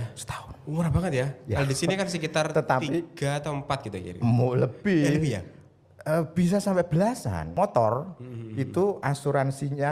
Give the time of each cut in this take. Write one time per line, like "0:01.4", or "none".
0:07.4